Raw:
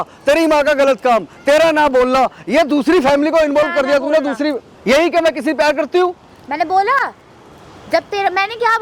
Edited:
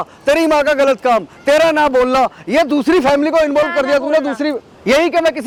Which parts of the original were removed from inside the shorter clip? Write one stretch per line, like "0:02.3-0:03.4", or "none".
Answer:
none